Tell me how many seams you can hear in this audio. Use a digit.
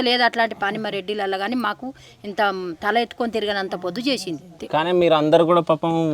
1